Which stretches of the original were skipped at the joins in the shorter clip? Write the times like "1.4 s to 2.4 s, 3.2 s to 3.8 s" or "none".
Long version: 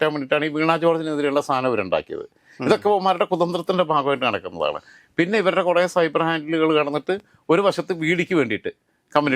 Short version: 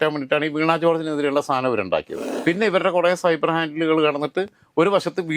2.2 s to 5.0 s

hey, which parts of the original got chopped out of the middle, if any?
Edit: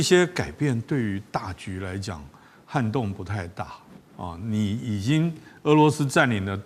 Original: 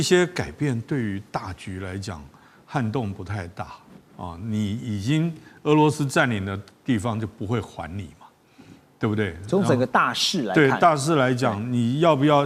none

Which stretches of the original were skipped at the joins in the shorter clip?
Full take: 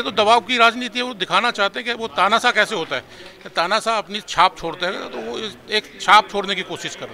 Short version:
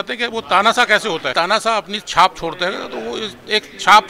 2.9 s to 3.5 s

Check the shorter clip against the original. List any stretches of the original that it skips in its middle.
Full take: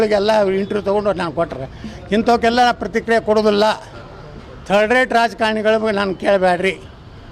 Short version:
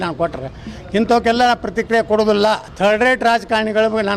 3.9 s to 4.6 s

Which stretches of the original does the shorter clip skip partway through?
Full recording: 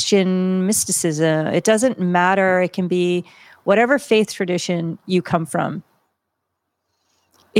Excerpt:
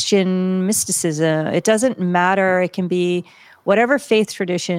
none

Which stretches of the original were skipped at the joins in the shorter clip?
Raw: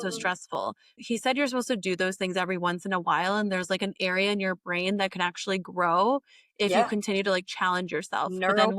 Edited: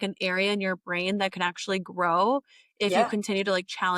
none

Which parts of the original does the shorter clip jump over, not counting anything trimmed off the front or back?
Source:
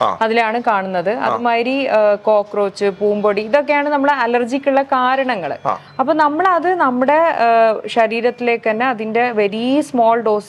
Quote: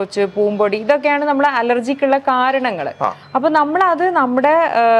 none

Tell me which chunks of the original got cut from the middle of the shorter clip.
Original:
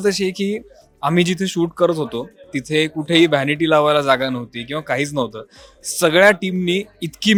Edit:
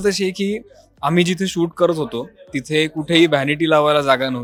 none

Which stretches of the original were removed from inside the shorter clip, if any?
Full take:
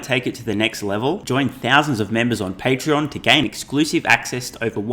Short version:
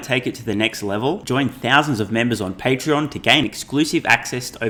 none

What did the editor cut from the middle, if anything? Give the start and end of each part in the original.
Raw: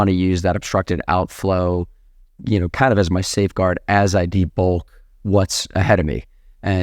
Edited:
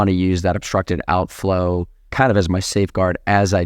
2.1 s to 2.7 s

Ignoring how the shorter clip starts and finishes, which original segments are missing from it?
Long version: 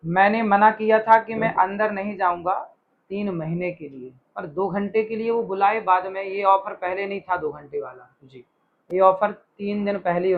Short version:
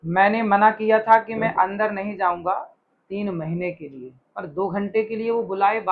none

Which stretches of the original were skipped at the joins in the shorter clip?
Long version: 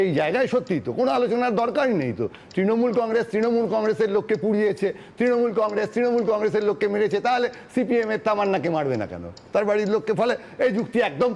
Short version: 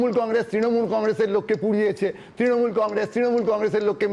none

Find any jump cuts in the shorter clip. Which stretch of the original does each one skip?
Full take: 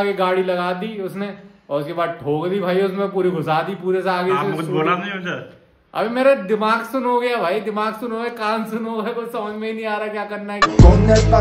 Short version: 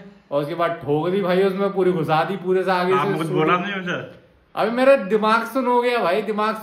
none

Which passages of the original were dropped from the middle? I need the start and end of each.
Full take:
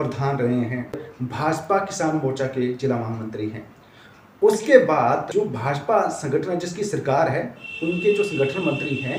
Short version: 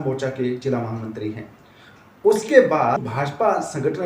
5.2 s to 5.5 s

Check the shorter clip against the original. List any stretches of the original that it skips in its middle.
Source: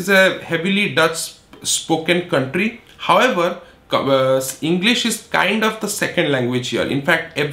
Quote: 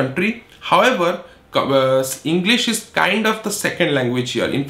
none

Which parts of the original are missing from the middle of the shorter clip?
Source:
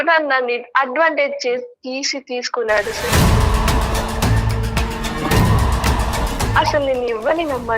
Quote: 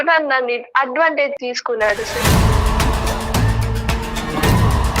1.4 s to 2.2 s

